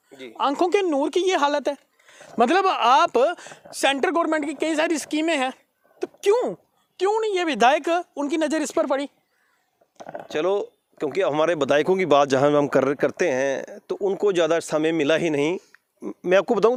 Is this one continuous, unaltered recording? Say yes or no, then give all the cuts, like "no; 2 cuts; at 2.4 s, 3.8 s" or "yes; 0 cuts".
yes; 0 cuts